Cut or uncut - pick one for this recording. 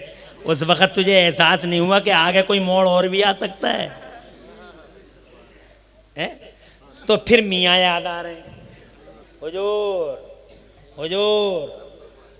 uncut